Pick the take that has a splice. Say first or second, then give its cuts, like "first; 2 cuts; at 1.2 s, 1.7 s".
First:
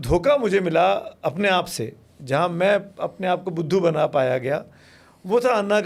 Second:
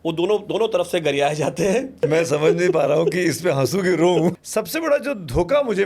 second; 2 cuts; at 2.0 s, 4.3 s